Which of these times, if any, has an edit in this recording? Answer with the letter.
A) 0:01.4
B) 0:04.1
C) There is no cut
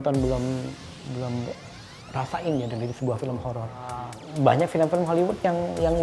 B